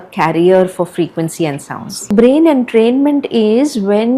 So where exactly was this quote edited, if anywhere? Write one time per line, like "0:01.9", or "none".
0:02.1